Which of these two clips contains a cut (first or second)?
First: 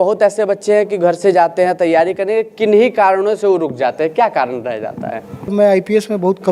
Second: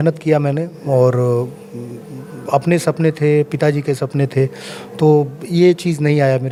first